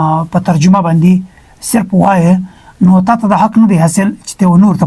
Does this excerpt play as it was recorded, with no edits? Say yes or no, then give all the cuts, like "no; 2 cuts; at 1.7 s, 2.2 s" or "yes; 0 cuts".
yes; 0 cuts